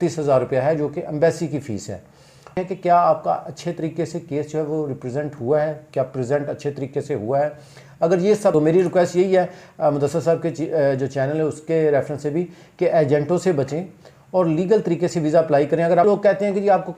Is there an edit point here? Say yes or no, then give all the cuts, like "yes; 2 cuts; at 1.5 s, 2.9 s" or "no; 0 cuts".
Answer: yes; 3 cuts; at 2.6 s, 8.5 s, 16.1 s